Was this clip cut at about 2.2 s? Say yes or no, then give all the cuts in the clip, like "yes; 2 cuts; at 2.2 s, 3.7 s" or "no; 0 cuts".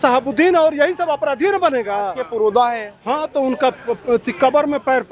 yes; 1 cut; at 2.2 s